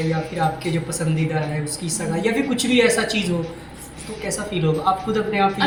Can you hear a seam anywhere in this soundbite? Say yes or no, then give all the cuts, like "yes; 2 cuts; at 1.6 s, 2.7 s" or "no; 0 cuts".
no; 0 cuts